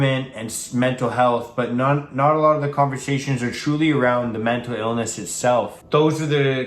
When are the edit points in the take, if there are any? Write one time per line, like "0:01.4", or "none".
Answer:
0:05.8